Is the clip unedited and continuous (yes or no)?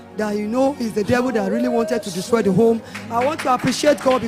yes